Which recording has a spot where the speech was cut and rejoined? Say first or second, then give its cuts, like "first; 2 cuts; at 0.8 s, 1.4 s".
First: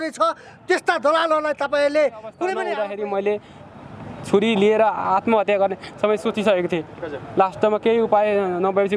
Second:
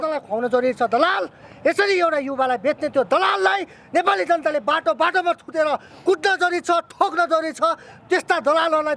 first; 1 cut; at 2.6 s